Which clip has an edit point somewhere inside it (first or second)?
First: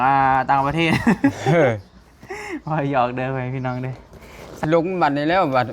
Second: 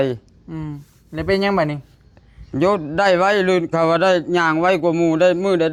first